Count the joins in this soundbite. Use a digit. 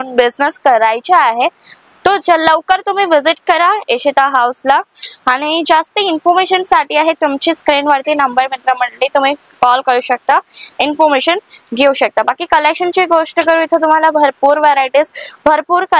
0